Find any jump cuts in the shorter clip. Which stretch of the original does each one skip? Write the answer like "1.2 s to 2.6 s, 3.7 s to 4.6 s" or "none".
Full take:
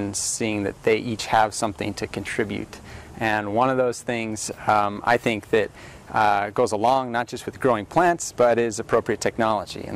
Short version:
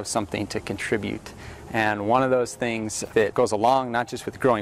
4.7 s to 6.4 s